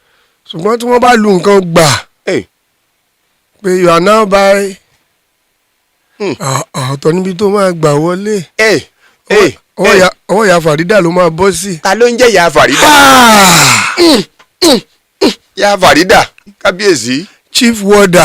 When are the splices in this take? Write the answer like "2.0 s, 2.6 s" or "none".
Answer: 16.4 s